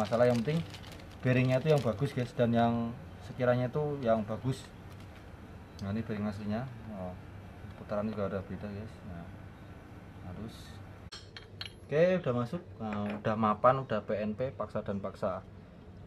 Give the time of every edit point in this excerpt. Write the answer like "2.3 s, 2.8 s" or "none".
11.2 s